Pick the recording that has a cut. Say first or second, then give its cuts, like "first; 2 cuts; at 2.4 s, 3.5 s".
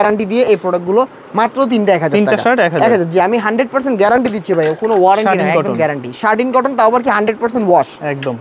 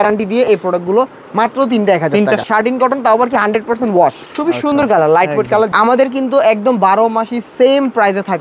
second; 3 cuts; at 2.4 s, 4.2 s, 5.7 s